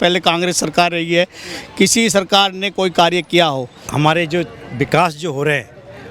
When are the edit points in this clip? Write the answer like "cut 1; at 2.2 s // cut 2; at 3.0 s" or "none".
cut 1; at 3.8 s